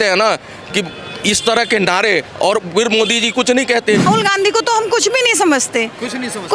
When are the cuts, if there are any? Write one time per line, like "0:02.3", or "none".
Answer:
0:04.0